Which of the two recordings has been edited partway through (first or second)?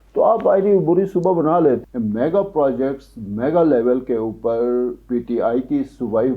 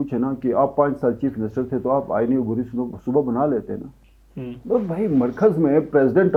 first